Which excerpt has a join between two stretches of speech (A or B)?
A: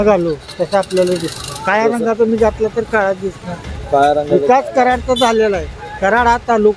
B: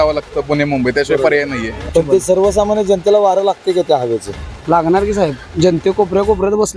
B